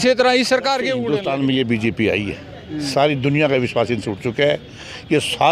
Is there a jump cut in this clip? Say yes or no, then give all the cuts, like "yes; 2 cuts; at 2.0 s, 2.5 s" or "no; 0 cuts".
yes; 1 cut; at 1.0 s